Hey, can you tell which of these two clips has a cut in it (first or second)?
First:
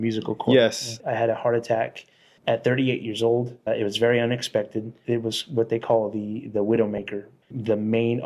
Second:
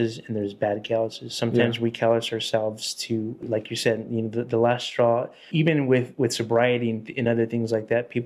first